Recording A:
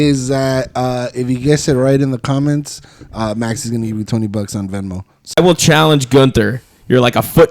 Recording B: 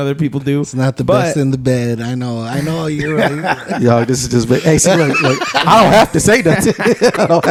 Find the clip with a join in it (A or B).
A